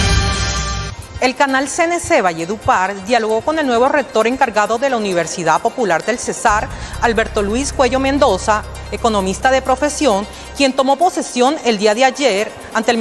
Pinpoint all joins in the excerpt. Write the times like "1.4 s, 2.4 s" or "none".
1.1 s